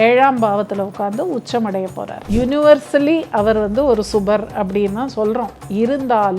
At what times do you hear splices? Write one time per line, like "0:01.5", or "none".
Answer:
0:02.2

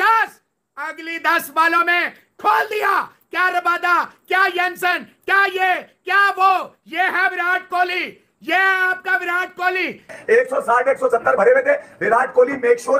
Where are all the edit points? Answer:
0:10.2

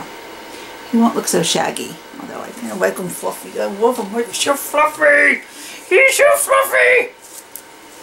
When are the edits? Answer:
none

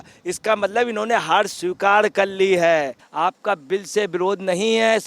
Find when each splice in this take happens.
0:03.0

